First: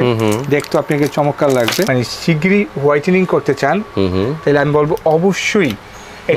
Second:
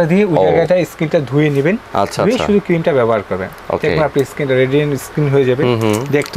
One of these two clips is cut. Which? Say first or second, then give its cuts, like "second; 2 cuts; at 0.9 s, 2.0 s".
first; 1 cut; at 1.9 s